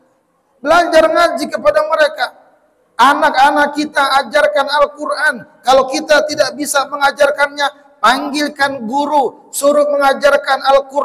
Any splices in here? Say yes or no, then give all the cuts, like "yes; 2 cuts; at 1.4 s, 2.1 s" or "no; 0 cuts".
no; 0 cuts